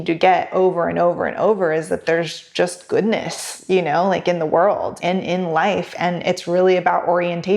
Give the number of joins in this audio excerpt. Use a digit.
1